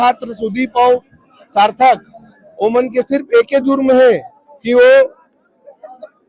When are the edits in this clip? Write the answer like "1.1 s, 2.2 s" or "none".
none